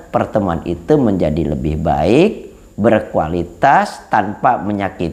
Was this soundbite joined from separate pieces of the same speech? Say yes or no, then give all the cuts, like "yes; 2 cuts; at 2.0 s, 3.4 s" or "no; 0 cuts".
no; 0 cuts